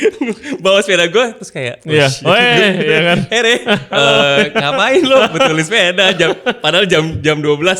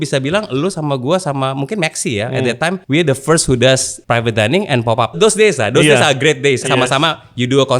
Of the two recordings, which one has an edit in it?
second; 4 cuts; at 2.8 s, 3.9 s, 5.2 s, 6.6 s

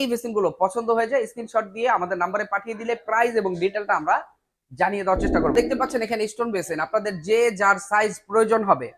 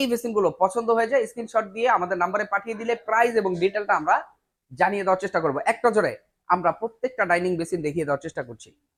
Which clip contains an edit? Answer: first; 1 cut; at 5.5 s

